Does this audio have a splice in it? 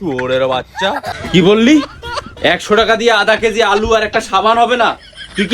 yes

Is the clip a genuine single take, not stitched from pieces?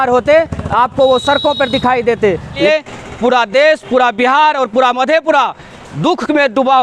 no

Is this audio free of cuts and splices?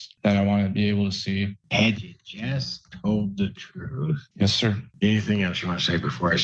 no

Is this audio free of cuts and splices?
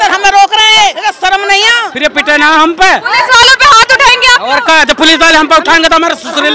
no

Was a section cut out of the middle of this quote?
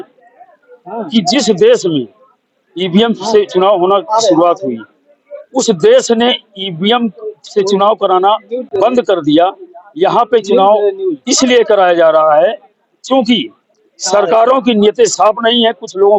no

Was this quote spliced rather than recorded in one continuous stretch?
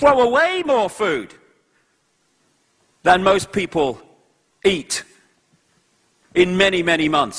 yes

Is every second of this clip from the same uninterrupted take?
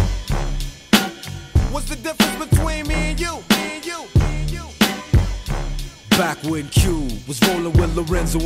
no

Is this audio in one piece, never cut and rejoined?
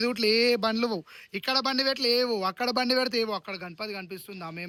yes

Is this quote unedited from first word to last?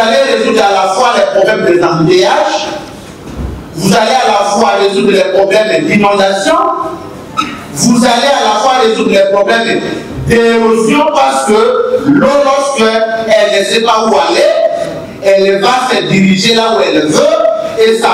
yes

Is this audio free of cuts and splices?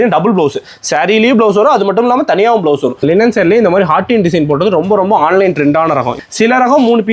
no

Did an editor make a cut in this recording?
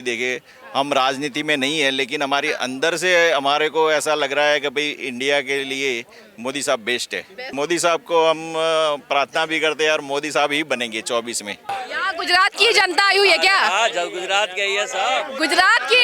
yes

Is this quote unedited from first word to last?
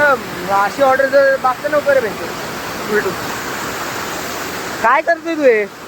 no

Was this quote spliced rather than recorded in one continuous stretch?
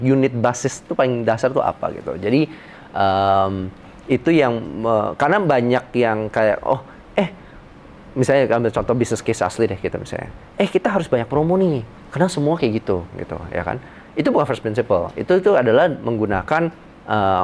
no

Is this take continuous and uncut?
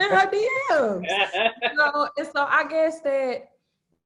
yes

